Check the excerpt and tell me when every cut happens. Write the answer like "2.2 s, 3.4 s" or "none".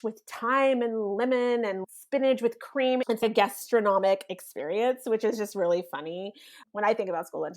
1.8 s, 3.1 s